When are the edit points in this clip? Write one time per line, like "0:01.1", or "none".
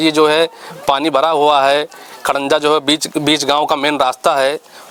none